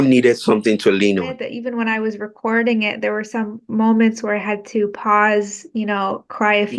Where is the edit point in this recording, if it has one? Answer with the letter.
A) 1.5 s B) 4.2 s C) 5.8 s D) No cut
A